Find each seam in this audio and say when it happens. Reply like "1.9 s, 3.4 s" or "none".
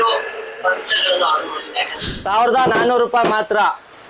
2.0 s